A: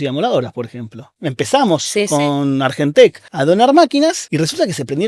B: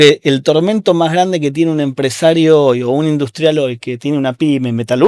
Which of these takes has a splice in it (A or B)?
A